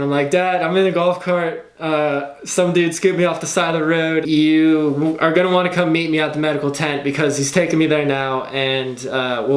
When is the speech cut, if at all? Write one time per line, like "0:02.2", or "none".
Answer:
none

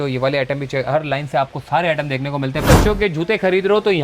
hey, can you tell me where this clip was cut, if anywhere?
0:02.6

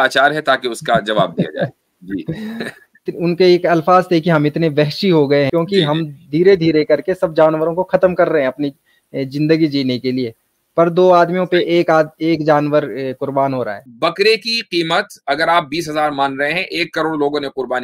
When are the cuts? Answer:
0:03.1
0:05.5
0:13.8

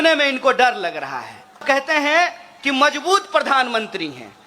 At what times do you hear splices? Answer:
0:01.6

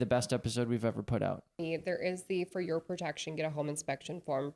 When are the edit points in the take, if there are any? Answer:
0:01.6

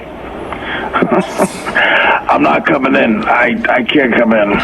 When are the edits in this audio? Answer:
0:02.8

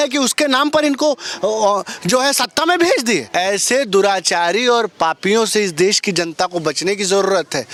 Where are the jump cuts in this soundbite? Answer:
none

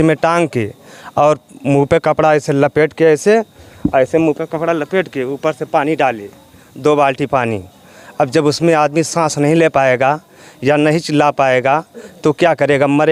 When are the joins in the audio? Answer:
none

